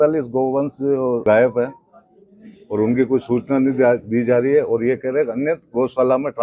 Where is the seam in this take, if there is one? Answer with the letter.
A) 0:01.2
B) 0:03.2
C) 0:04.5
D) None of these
A